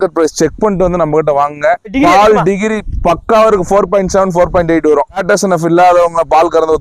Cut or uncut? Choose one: uncut